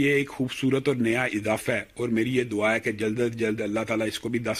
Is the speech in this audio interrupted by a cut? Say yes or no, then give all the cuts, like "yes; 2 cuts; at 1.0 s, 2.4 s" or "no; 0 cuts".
no; 0 cuts